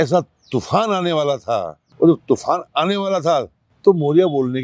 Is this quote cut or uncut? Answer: cut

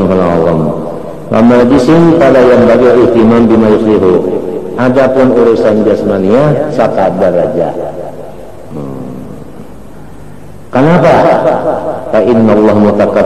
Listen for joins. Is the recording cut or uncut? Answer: uncut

